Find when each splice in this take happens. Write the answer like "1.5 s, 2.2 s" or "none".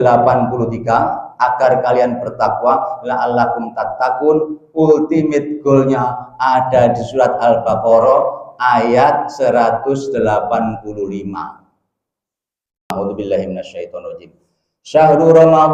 12.9 s